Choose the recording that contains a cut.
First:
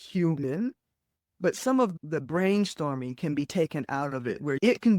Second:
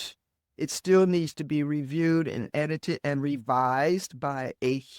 first; 1 cut; at 1.9 s

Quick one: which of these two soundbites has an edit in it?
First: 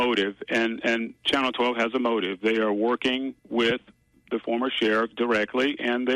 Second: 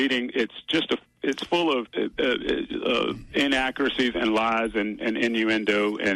second; 1 cut; at 1.9 s

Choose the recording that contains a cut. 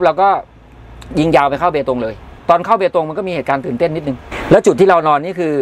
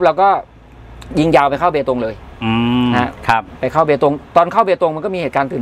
first; 2 cuts; at 2.4 s, 4.3 s

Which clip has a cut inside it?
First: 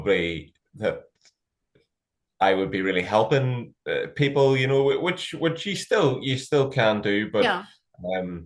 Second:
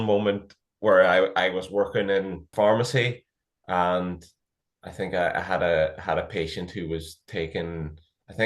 second; 1 cut; at 2.4 s

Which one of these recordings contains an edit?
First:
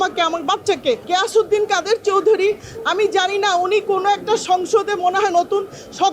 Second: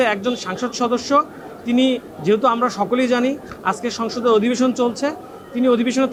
first; 1 cut; at 1.0 s

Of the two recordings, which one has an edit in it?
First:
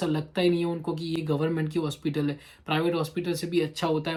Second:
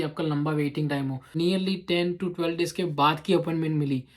second; 1 cut; at 1.3 s

